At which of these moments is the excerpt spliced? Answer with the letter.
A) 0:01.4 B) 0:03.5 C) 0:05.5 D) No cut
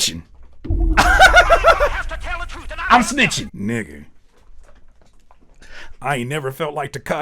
B